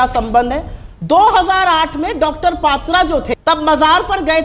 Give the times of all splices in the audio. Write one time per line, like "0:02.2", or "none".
0:03.3